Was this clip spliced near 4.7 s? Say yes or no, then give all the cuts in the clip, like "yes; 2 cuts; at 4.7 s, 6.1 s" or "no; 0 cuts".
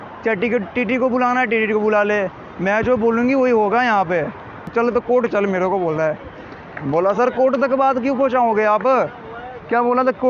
yes; 1 cut; at 4.7 s